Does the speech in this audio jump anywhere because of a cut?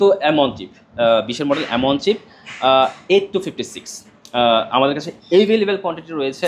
no; 0 cuts

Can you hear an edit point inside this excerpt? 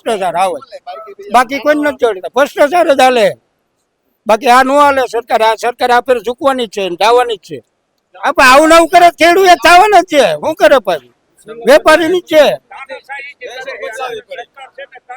no; 0 cuts

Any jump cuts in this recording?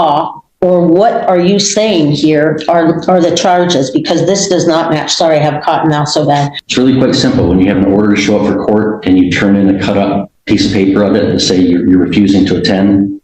yes; 2 cuts; at 6.6 s, 10.3 s

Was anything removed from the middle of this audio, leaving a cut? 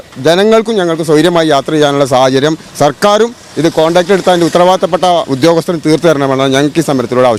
no; 0 cuts

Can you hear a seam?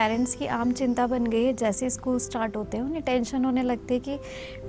no; 0 cuts

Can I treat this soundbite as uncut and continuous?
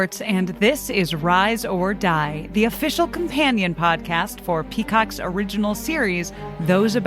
yes; 0 cuts

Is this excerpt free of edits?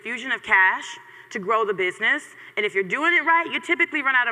yes; 0 cuts

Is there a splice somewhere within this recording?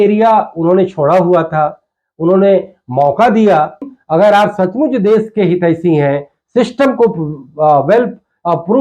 yes; 1 cut; at 4.0 s

